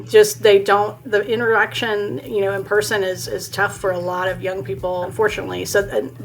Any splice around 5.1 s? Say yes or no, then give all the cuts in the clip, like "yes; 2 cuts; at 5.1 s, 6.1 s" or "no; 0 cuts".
yes; 2 cuts; at 1.1 s, 5.1 s